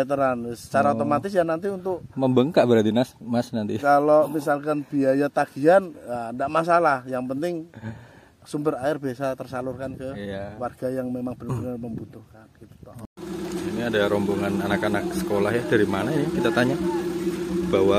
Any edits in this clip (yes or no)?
yes